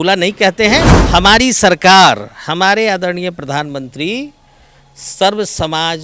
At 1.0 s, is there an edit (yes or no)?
yes